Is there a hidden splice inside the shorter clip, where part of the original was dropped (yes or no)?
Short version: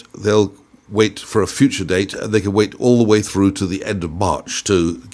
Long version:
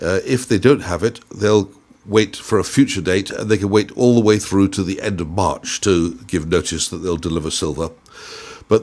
no